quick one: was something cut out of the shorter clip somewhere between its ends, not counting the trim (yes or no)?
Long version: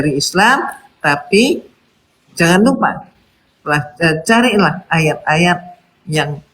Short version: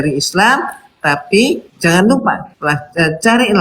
yes